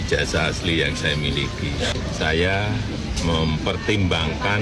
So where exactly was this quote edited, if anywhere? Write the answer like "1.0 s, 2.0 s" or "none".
1.9 s